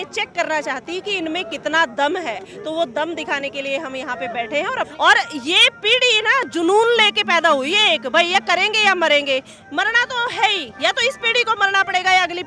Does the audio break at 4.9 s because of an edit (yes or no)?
yes